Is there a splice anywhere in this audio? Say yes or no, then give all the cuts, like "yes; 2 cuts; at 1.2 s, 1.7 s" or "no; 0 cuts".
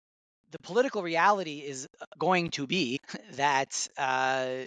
yes; 1 cut; at 3.1 s